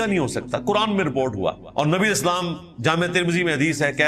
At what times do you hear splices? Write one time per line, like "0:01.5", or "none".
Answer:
0:01.6